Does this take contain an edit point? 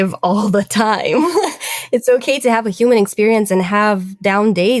no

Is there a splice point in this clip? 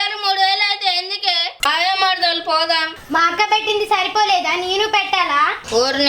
yes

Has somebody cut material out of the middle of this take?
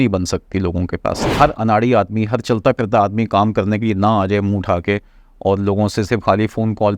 yes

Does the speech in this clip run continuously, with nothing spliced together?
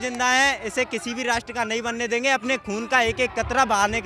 yes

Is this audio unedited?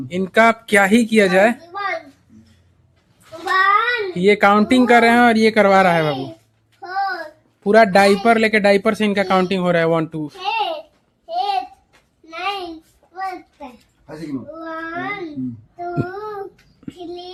yes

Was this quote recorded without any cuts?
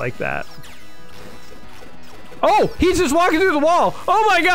yes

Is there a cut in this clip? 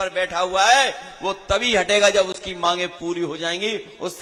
no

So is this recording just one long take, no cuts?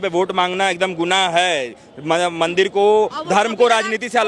yes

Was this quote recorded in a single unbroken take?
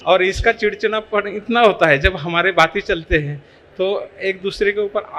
yes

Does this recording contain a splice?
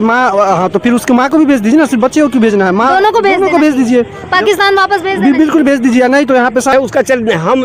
yes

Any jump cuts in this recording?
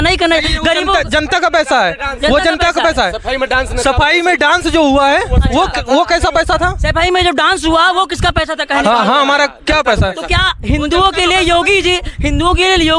no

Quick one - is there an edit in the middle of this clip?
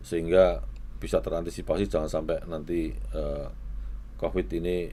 no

